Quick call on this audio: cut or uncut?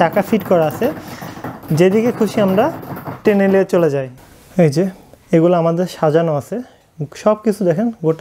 cut